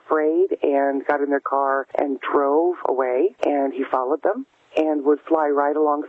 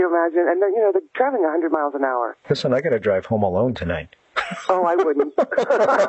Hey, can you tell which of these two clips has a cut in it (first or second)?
first